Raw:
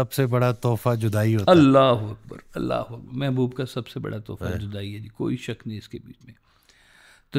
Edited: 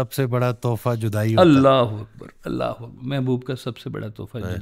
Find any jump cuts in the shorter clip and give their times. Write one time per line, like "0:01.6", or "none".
0:01.3